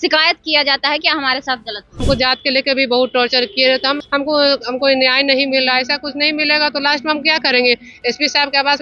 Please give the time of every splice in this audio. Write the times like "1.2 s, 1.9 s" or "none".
2.0 s, 4.0 s